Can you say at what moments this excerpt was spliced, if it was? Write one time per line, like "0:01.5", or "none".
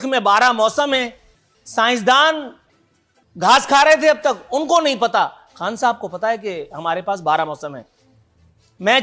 none